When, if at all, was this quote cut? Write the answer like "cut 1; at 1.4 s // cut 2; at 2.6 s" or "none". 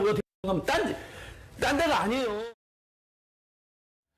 cut 1; at 2.0 s